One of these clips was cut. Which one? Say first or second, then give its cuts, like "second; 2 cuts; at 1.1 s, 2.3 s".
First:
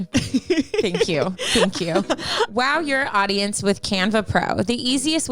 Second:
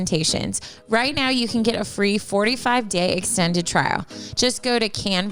first; 1 cut; at 2.5 s